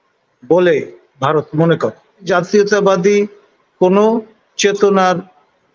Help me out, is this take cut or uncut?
cut